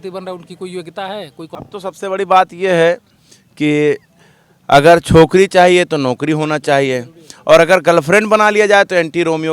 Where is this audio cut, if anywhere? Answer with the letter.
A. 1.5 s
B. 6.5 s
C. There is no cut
A